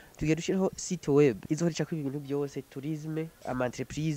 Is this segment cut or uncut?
cut